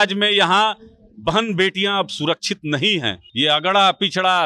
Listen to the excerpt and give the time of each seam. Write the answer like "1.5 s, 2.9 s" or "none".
3.2 s